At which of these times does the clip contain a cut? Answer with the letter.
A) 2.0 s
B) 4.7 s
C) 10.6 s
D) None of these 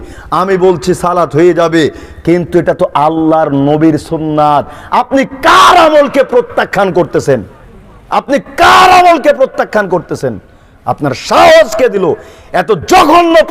D